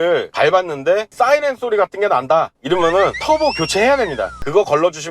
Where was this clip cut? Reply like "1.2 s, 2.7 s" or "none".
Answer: none